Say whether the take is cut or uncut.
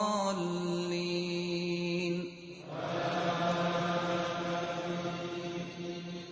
uncut